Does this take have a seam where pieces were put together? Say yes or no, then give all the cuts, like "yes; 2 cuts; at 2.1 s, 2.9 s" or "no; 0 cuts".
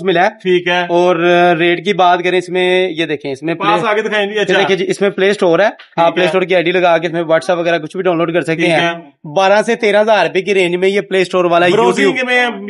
no; 0 cuts